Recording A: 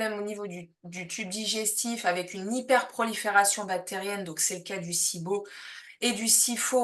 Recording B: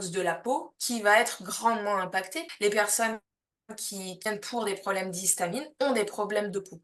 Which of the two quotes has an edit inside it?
B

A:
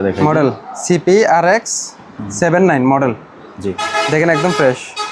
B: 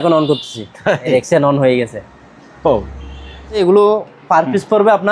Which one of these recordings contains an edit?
B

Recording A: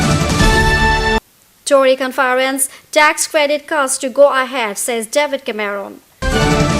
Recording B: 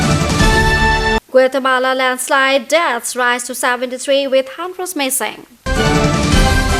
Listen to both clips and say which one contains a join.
A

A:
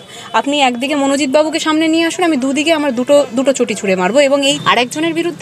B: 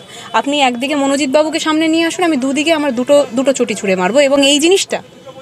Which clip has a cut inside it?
A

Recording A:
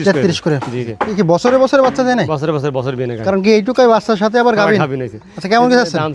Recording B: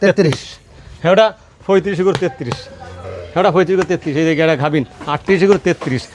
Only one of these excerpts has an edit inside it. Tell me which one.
A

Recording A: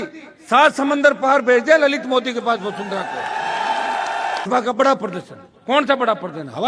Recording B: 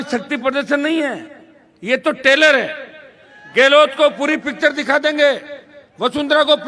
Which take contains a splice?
A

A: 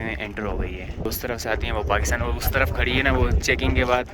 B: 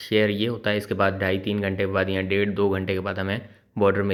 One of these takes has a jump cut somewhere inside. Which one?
A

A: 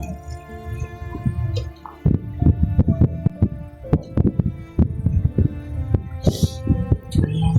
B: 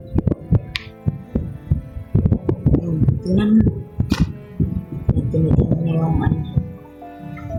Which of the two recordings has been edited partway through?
A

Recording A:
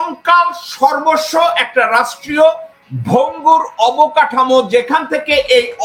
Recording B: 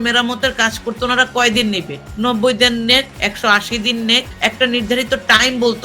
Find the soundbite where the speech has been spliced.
B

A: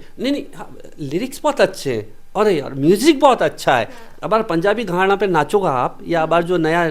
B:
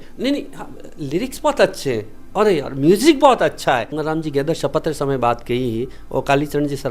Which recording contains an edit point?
B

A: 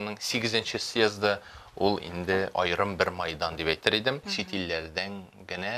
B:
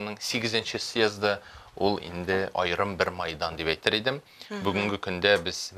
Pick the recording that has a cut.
A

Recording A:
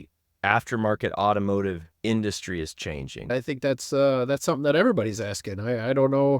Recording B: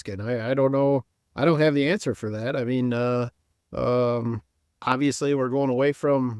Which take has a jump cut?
A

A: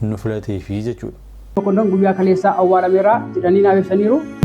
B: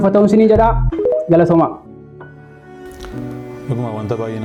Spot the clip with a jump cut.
A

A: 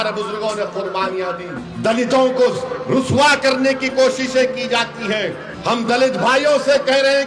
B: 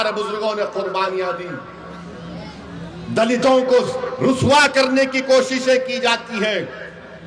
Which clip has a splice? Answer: A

